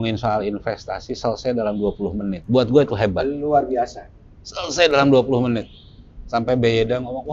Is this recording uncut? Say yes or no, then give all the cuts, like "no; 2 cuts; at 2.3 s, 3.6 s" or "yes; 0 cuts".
no; 1 cut; at 2.4 s